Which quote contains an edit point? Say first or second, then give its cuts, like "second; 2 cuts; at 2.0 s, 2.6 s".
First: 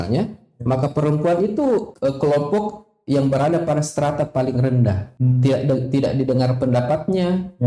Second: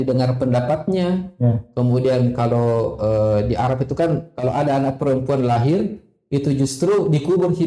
first; 2 cuts; at 1.9 s, 5.1 s